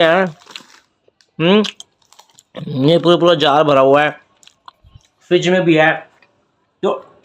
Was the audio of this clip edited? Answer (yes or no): no